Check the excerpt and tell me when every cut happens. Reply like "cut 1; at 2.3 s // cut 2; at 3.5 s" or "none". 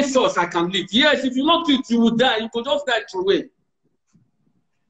none